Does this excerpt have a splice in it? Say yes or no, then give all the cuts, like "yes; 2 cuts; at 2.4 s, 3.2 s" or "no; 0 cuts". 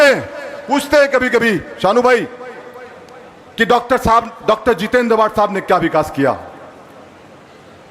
no; 0 cuts